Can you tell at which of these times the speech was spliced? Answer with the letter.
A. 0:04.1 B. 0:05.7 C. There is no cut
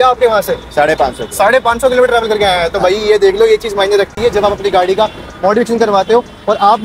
C